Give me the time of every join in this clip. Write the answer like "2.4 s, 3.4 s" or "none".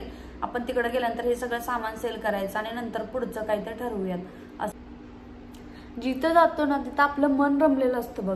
4.8 s